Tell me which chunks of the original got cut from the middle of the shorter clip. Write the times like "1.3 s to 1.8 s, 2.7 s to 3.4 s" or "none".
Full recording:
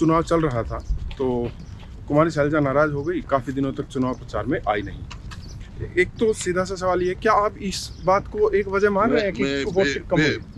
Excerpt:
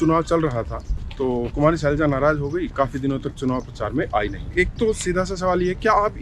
1.5 s to 2.0 s, 4.9 s to 5.8 s